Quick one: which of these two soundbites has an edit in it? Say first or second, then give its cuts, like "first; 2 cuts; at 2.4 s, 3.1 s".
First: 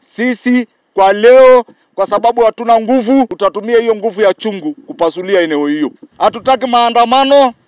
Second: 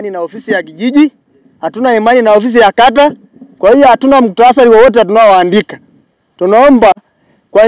first; 2 cuts; at 3.3 s, 6.0 s